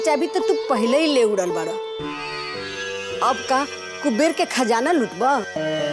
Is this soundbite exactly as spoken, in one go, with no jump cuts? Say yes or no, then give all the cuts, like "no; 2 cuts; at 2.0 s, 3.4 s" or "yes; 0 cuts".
yes; 0 cuts